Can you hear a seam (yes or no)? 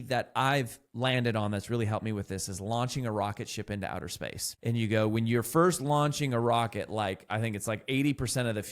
yes